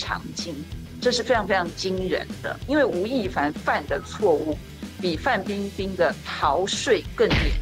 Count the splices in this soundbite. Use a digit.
1